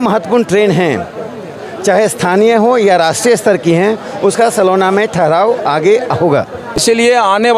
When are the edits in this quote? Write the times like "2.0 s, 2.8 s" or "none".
6.7 s